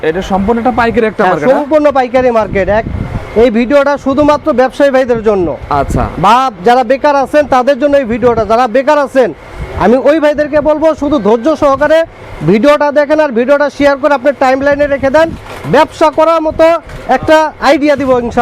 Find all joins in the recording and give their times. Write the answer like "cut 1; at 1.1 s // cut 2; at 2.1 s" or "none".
none